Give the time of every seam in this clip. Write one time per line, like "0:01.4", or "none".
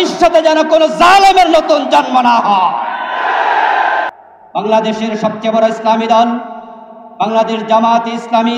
0:04.2